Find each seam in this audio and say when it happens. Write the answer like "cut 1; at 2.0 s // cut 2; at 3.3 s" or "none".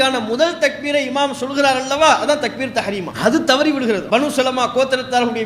cut 1; at 3.1 s // cut 2; at 4.0 s